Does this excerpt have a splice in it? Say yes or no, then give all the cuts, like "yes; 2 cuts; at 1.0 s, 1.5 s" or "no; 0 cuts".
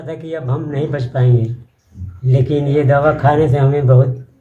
no; 0 cuts